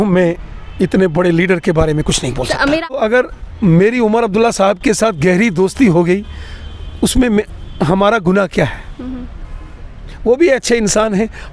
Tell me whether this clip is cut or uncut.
cut